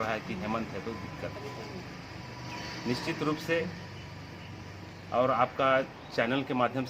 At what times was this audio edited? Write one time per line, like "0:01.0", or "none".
none